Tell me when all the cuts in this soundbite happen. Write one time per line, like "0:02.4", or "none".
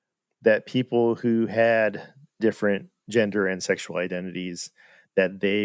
0:02.4